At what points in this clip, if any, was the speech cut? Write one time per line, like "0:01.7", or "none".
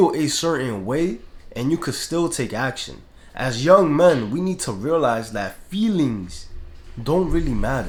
none